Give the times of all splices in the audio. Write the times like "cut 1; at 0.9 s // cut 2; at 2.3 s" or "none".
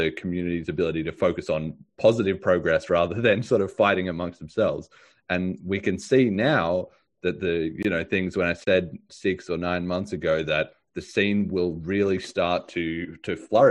none